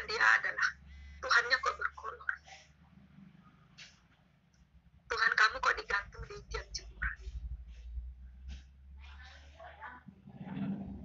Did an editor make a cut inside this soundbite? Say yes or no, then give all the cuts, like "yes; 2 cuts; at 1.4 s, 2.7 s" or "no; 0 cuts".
no; 0 cuts